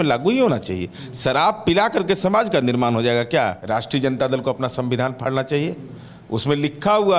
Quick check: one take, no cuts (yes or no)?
no